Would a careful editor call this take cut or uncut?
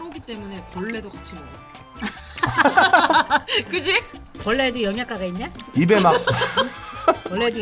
cut